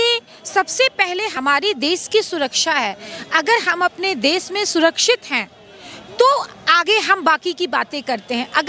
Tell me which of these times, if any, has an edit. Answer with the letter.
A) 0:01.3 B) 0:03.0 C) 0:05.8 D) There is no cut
A